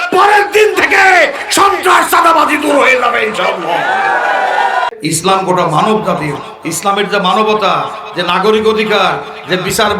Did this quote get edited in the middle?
yes; 1 cut; at 4.9 s

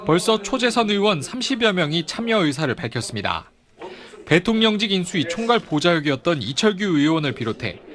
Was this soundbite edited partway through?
no; 0 cuts

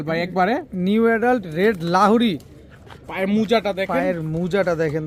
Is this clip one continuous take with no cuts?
yes; 0 cuts

